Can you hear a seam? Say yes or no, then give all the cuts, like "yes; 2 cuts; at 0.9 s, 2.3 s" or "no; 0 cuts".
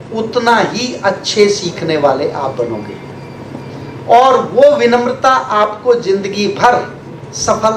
no; 0 cuts